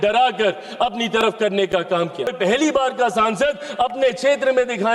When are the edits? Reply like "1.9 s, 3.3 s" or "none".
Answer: 2.3 s